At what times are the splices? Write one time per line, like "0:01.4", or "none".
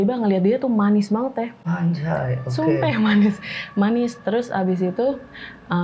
none